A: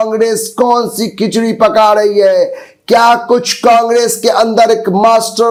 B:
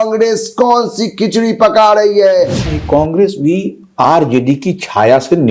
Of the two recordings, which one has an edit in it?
B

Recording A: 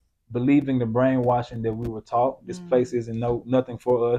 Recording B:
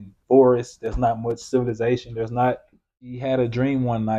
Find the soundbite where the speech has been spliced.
B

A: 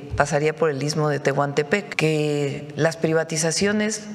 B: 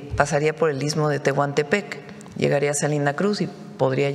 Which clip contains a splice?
A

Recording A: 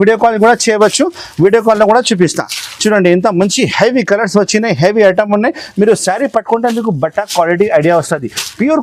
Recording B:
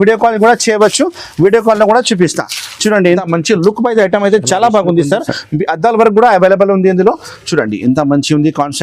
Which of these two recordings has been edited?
B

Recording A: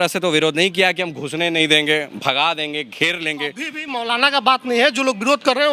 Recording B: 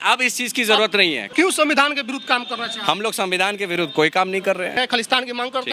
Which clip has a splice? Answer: B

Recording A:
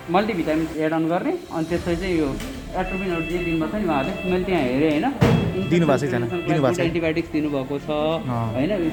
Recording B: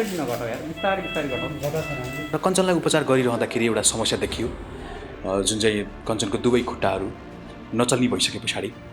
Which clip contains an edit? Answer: B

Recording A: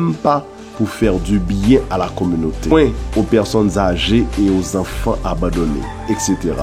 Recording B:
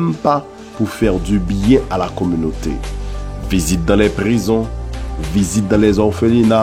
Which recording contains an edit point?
A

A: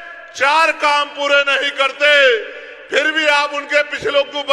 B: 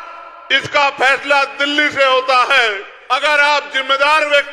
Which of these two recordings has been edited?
B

